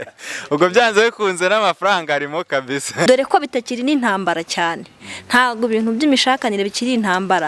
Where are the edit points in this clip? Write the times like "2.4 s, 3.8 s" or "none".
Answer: 3.1 s